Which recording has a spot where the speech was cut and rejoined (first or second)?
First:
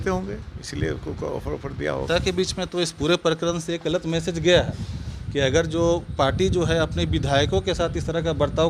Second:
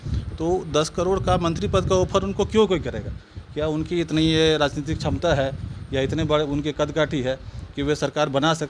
first